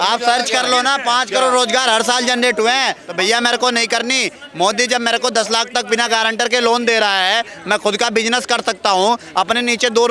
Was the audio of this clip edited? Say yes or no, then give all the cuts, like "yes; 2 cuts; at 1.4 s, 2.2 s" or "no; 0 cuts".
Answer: yes; 1 cut; at 3.0 s